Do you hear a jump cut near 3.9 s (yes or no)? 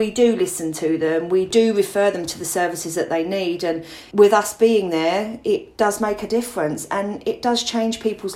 yes